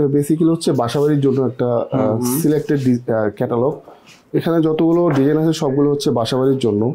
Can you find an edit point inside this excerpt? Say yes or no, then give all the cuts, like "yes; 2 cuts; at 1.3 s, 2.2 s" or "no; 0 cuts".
no; 0 cuts